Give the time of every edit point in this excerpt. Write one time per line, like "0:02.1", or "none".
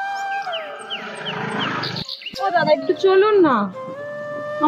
0:02.1